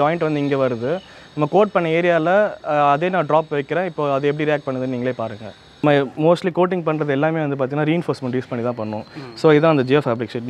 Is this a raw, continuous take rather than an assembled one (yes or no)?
no